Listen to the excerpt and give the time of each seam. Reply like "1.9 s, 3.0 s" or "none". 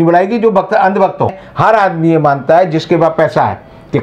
1.5 s